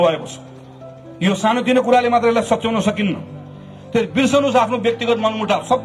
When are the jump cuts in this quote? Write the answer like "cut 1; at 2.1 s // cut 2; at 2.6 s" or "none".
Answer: none